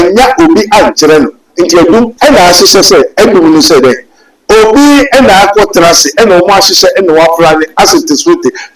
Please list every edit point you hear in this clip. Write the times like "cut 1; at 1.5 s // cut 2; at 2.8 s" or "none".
cut 1; at 2.1 s